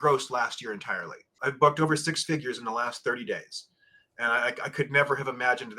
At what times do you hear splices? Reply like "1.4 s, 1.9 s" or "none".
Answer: 1.3 s